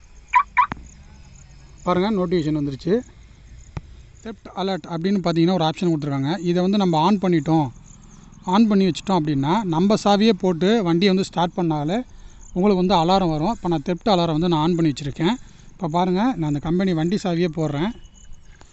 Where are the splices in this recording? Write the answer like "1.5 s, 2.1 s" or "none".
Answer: 4.4 s